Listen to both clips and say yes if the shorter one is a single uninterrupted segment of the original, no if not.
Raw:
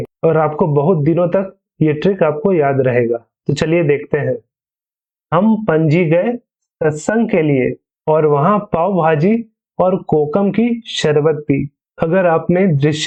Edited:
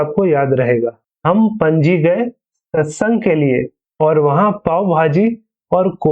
no